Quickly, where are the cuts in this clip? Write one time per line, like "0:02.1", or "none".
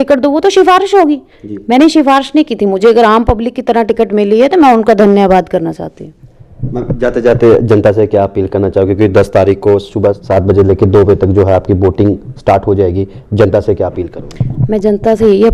none